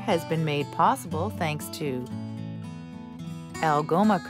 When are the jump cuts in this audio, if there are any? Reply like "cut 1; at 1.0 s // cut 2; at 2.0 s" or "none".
cut 1; at 2.0 s // cut 2; at 3.2 s